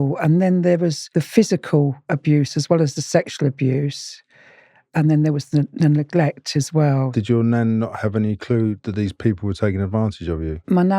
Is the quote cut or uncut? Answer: cut